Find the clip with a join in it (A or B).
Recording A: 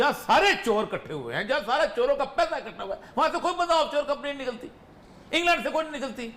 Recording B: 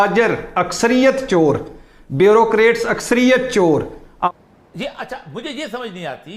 B